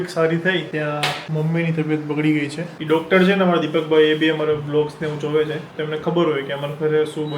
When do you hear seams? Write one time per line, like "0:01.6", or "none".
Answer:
0:01.0
0:02.7